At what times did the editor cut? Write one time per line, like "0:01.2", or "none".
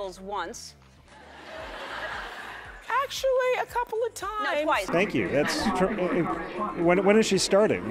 0:04.9